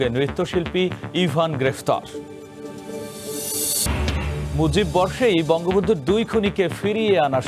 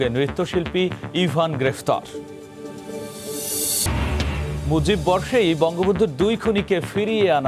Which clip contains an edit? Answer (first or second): first